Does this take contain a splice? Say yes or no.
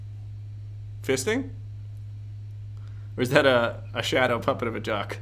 no